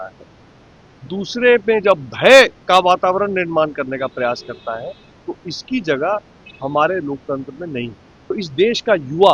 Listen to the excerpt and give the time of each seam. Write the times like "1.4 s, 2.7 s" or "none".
2.6 s, 8.3 s